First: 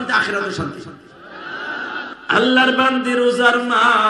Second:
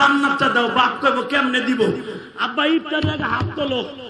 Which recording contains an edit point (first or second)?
first